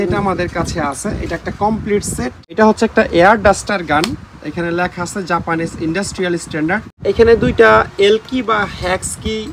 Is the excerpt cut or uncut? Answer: cut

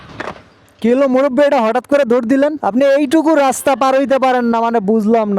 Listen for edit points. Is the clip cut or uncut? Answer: cut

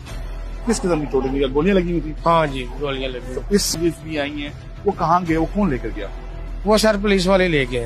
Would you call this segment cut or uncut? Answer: cut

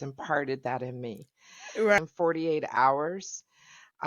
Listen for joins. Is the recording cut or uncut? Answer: cut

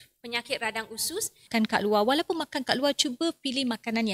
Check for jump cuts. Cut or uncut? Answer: cut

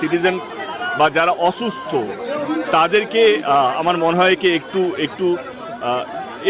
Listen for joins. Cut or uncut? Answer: uncut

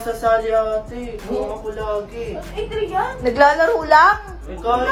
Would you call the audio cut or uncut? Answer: uncut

